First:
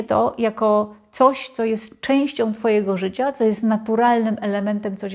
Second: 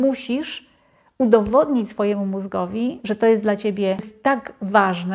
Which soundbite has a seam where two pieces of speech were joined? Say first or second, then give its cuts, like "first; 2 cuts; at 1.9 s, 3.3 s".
second; 1 cut; at 4.1 s